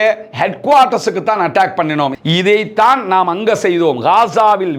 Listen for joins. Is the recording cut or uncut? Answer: cut